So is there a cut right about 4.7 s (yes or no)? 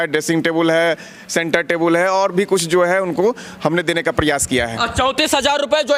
no